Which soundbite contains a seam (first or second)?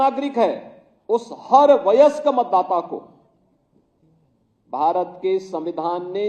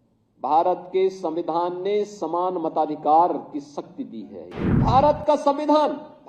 second